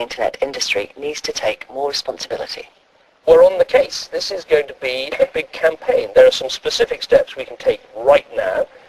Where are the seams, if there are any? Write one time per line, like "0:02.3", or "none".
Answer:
0:04.8